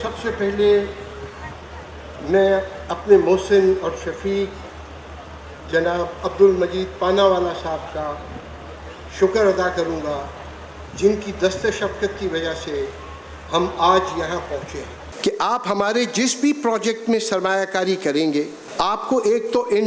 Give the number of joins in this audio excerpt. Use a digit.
2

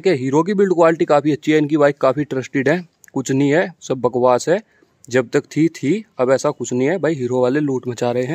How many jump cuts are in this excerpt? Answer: 0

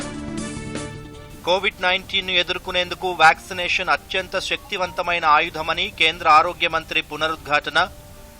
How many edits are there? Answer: 1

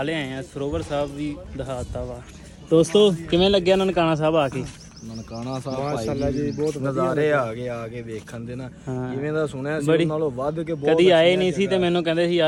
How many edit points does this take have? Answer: 0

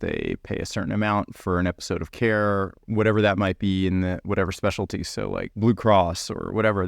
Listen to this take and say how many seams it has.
2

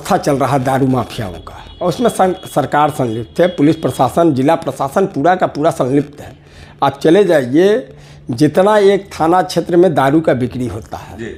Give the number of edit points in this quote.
0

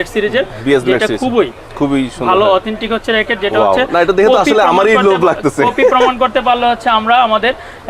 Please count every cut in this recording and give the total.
0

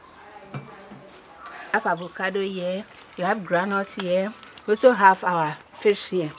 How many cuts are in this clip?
1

